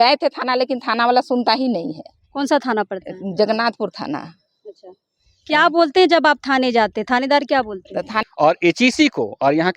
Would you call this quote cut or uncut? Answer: cut